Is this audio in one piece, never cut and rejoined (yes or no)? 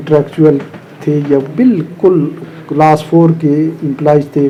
yes